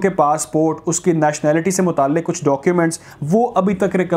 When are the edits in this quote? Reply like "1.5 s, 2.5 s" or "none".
none

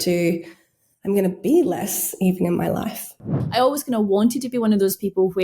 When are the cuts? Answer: 3.4 s

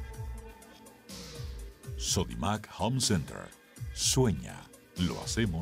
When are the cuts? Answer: 2.0 s

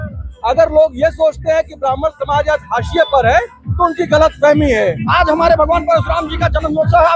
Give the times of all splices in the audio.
5.0 s

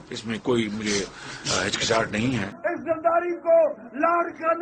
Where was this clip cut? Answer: 2.5 s

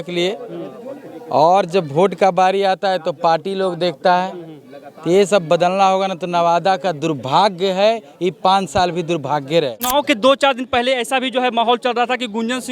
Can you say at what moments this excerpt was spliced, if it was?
9.9 s

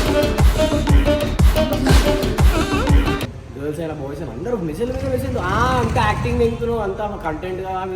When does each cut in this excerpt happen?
3.4 s

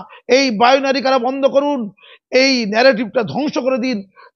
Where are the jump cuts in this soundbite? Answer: none

